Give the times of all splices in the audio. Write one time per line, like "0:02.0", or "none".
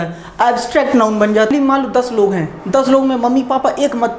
0:01.5